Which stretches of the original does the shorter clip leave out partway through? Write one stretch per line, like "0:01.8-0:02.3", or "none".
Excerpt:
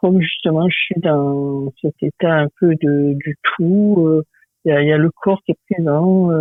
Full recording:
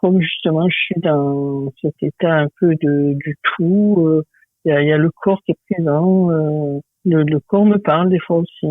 none